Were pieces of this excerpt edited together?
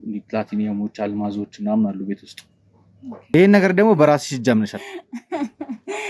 yes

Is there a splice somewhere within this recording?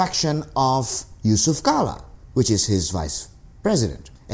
no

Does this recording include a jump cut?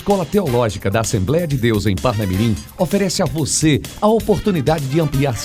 no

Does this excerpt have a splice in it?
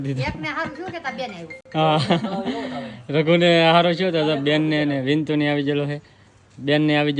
no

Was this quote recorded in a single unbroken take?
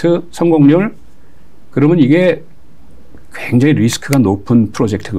yes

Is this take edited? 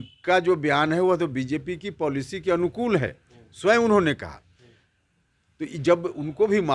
no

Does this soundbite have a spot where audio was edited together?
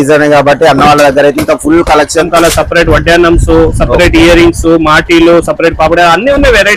yes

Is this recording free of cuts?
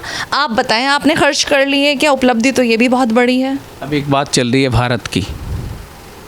no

